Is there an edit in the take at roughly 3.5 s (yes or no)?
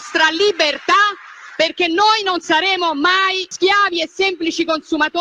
yes